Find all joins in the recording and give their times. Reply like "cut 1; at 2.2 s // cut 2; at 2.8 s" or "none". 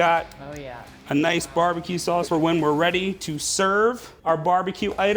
cut 1; at 2.3 s // cut 2; at 4.1 s